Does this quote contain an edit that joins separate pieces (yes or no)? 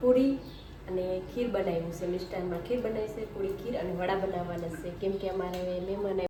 no